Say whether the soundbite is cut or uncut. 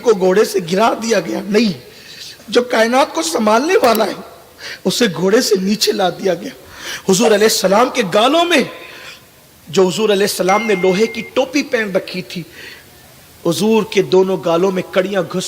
cut